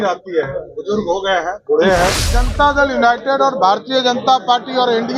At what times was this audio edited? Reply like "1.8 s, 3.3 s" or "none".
2.4 s